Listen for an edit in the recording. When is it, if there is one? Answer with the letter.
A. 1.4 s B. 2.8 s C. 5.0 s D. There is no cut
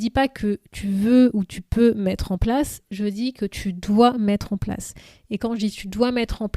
D